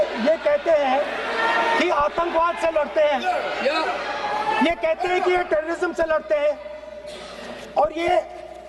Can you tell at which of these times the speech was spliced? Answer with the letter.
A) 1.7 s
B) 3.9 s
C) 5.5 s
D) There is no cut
D